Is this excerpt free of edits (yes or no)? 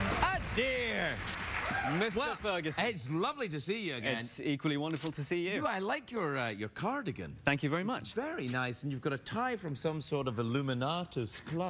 no